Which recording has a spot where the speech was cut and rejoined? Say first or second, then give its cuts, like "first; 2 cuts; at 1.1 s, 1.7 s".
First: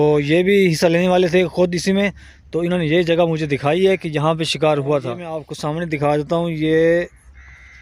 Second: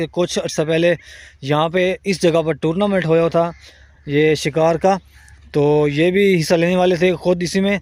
first; 1 cut; at 5.5 s